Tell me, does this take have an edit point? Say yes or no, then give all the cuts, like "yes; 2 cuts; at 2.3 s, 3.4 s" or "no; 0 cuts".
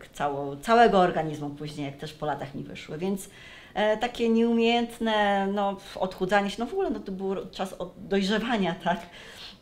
no; 0 cuts